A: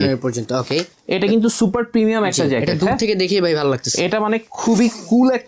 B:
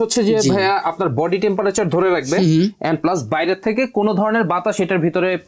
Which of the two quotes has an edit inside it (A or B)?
A